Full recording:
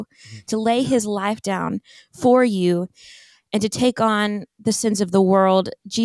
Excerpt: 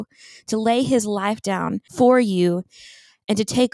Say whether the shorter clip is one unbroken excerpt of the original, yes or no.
no